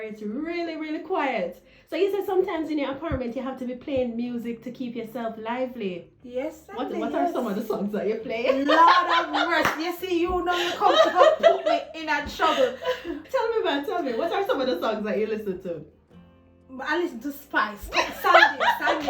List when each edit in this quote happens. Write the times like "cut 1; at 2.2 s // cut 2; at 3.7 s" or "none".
cut 1; at 13.1 s